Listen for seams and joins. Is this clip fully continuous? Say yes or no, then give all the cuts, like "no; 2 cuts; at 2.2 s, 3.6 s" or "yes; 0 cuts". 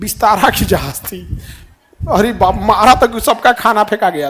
yes; 0 cuts